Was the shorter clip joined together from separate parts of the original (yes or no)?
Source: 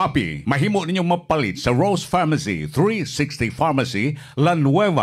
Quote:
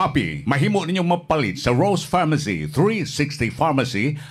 no